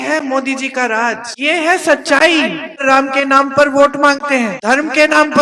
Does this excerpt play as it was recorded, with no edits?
no; 3 cuts; at 1.3 s, 2.8 s, 4.5 s

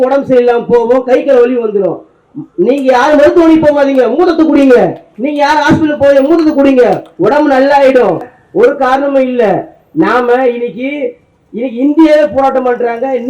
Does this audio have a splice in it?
yes; 1 cut; at 8.3 s

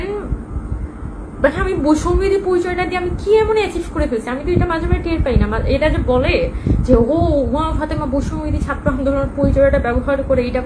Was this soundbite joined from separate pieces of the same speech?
no; 0 cuts

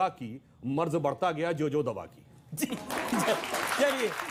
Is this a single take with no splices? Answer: yes; 0 cuts

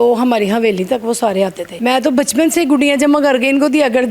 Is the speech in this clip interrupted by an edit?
yes; 1 cut; at 1.7 s

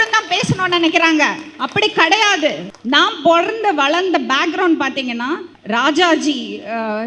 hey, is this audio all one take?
no; 2 cuts; at 2.7 s, 5.5 s

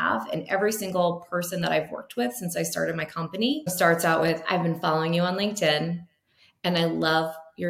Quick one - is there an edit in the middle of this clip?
yes; 1 cut; at 3.7 s

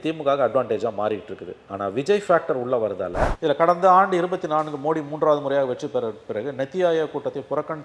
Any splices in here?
yes; 1 cut; at 3.3 s

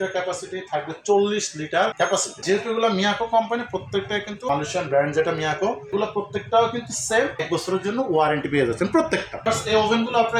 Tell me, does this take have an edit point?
no; 0 cuts

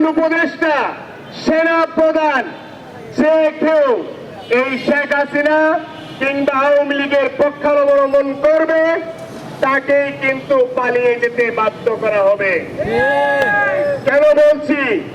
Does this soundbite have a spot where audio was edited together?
no; 0 cuts

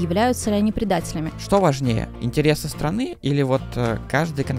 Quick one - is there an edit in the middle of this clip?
yes; 1 cut; at 1.2 s

